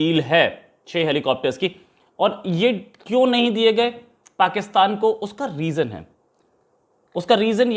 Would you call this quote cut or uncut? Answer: uncut